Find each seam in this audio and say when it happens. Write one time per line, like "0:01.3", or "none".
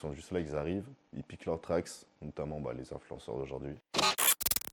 0:03.8